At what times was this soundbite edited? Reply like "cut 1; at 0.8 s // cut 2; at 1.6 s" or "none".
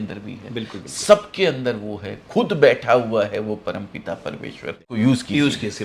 cut 1; at 5.0 s